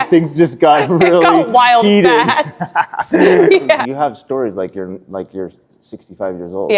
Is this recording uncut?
no; 1 cut; at 3.9 s

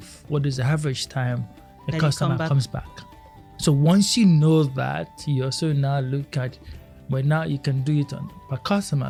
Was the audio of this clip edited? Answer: no; 0 cuts

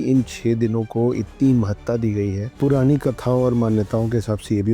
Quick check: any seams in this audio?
yes; 1 cut; at 2.5 s

